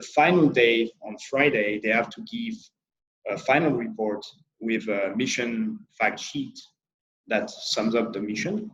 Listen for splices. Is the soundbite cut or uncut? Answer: uncut